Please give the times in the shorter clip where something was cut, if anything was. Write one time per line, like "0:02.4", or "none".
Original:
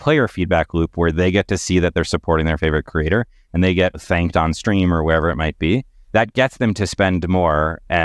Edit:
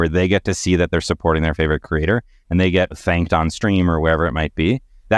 none